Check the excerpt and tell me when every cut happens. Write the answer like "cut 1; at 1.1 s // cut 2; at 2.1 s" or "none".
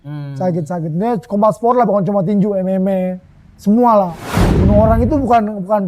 cut 1; at 4.5 s